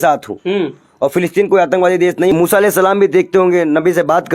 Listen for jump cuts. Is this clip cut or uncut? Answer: cut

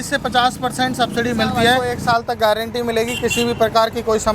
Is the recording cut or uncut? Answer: cut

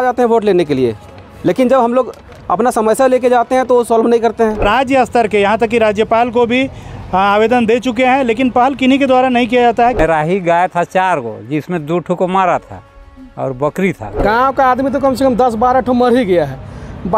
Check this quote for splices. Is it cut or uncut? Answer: cut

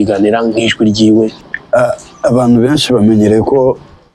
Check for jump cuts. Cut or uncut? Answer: cut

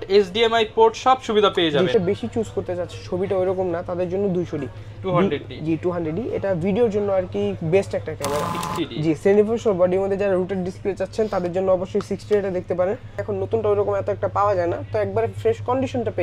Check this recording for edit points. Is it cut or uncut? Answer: cut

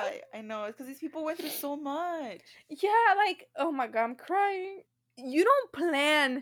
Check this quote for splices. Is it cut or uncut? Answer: cut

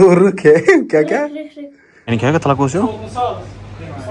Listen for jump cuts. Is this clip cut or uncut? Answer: cut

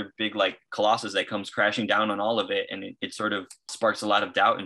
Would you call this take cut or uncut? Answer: cut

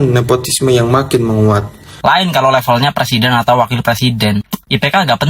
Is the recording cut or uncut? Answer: cut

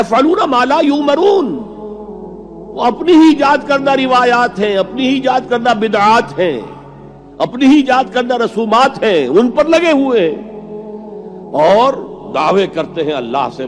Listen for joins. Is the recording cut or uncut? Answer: uncut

